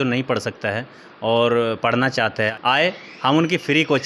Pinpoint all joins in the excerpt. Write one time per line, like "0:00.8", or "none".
0:02.5